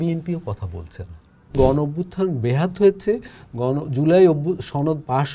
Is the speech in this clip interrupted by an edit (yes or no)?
yes